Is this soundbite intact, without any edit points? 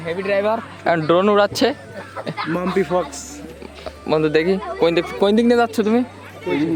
yes; 0 cuts

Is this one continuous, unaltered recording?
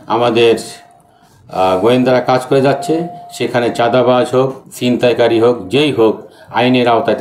yes; 0 cuts

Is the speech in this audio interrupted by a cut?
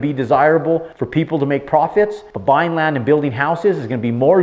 yes; 2 cuts; at 1.0 s, 2.3 s

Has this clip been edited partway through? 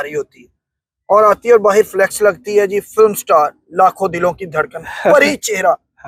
no; 0 cuts

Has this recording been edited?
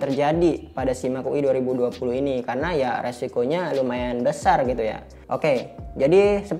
no; 0 cuts

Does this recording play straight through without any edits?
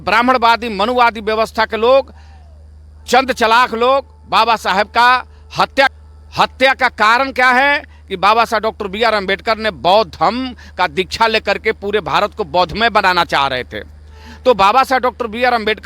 no; 1 cut; at 6.0 s

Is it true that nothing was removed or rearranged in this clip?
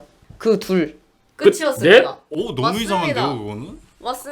yes; 0 cuts

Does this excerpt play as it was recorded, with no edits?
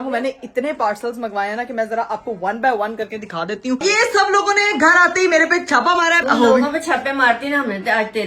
no; 2 cuts; at 3.8 s, 6.2 s

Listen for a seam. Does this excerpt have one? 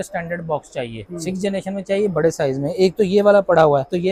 no; 0 cuts

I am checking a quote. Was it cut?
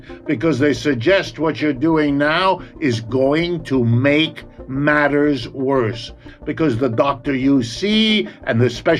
yes; 1 cut; at 6.3 s

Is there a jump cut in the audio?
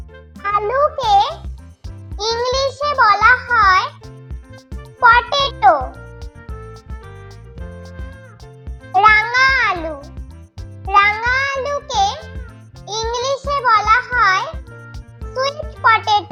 no; 0 cuts

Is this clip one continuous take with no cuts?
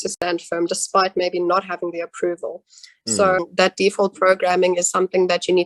no; 1 cut; at 3.4 s

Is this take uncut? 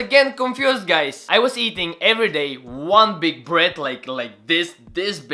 yes; 0 cuts

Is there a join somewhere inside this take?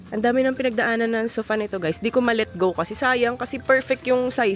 no; 0 cuts

